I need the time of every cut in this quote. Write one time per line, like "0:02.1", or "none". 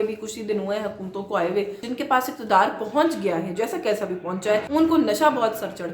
0:01.9
0:04.7